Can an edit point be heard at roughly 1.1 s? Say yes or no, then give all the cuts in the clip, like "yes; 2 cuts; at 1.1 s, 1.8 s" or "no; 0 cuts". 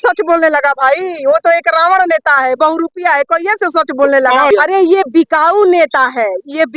no; 1 cut; at 4.5 s